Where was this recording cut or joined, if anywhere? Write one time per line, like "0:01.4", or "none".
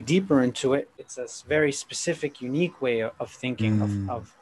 0:01.0